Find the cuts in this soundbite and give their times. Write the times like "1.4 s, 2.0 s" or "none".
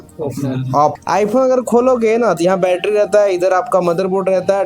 0.9 s